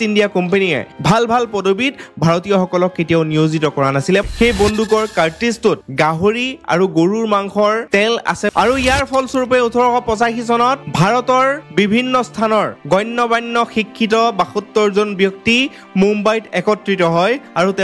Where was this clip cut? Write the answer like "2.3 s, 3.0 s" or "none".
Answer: 4.2 s, 8.5 s